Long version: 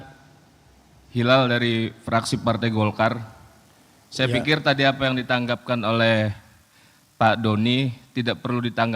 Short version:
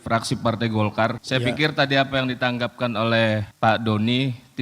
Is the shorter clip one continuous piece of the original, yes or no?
no